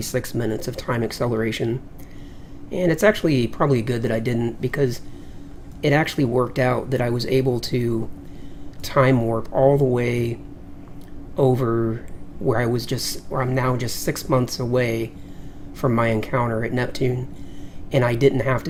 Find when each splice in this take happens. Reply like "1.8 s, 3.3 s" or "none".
none